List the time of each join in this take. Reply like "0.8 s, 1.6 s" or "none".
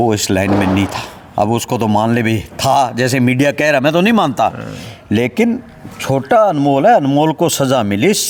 none